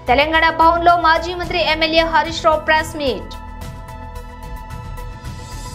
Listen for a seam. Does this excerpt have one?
no; 0 cuts

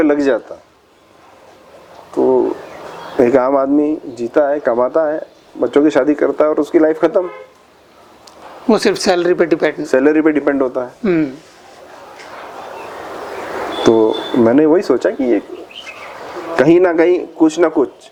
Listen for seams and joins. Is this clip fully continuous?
yes; 0 cuts

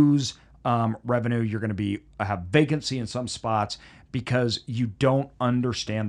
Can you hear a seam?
no; 0 cuts

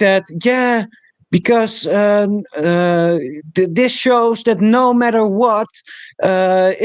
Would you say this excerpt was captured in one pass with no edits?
yes; 0 cuts

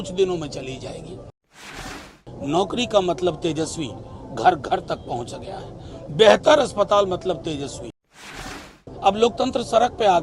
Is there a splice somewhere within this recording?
yes; 2 cuts; at 1.6 s, 8.5 s

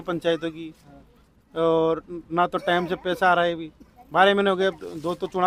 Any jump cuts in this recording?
no; 0 cuts

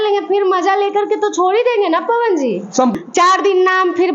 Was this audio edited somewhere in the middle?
yes; 1 cut; at 2.9 s

